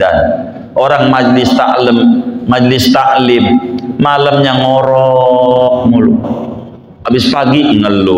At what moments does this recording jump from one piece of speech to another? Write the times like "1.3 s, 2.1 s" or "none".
none